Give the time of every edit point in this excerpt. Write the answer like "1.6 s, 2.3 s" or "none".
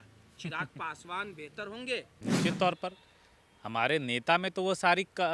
2.2 s